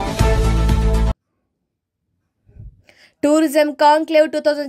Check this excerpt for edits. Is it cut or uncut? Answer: uncut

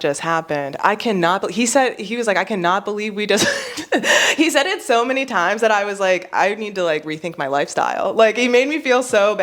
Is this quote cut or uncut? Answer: uncut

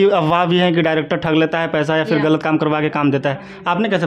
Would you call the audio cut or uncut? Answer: uncut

